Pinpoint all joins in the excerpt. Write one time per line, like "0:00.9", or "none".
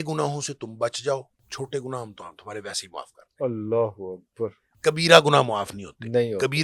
0:01.4
0:04.7